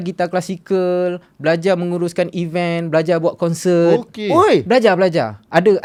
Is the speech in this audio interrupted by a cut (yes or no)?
no